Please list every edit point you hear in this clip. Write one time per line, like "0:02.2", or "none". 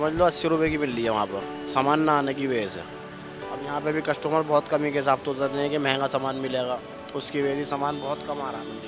none